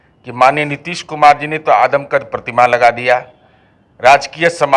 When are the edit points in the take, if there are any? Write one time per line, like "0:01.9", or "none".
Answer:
none